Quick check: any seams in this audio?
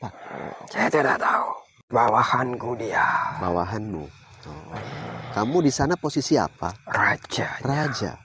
yes; 1 cut; at 1.7 s

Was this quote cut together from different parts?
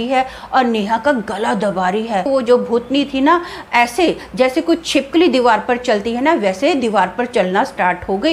yes; 1 cut; at 2.3 s

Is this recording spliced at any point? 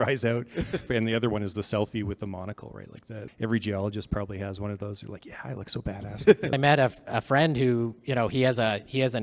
yes; 3 cuts; at 0.9 s, 3.2 s, 6.6 s

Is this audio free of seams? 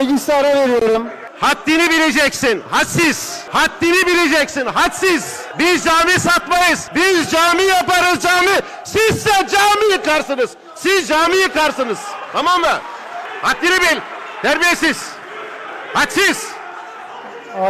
no; 5 cuts; at 1.2 s, 3.3 s, 5.4 s, 6.8 s, 13.3 s

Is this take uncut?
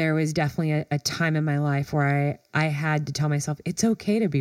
yes; 0 cuts

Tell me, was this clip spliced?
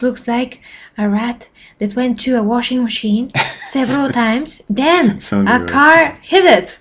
no; 0 cuts

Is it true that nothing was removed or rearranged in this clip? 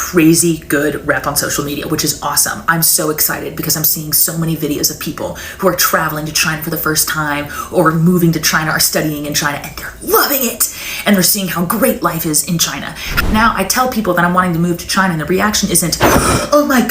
no; 1 cut; at 13.0 s

